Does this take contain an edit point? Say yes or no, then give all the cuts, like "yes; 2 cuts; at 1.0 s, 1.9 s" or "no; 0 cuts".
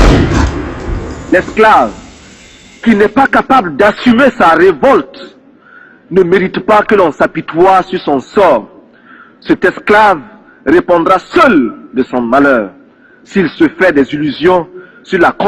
yes; 1 cut; at 1.3 s